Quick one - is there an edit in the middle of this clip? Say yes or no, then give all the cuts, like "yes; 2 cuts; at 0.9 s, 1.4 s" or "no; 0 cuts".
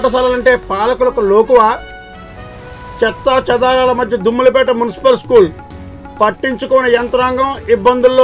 no; 0 cuts